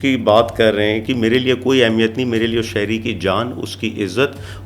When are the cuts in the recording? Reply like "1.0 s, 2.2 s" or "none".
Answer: 1.0 s